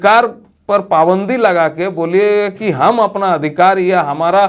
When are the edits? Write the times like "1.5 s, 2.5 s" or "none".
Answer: none

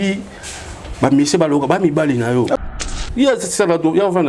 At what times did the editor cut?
2.7 s

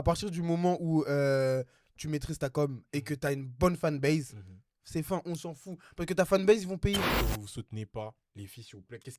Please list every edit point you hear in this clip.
7.1 s

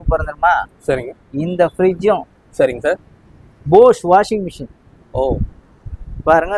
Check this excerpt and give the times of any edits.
none

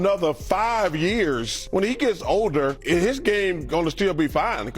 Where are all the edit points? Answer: 1.6 s, 2.8 s

